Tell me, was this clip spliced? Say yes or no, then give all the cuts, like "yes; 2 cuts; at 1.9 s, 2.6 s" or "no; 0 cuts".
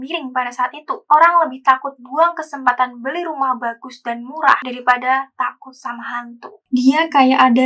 yes; 1 cut; at 6.6 s